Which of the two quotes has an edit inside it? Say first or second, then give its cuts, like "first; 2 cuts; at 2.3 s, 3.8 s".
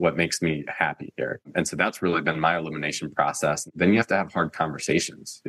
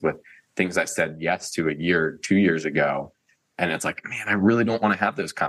first; 2 cuts; at 1.5 s, 3.7 s